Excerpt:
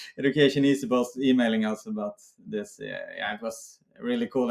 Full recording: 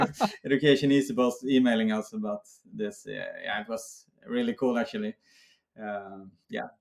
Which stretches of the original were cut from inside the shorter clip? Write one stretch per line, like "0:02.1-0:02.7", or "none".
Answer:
none